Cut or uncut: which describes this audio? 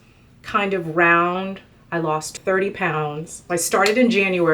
cut